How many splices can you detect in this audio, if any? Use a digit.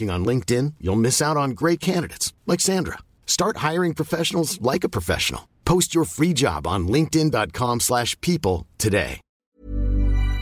1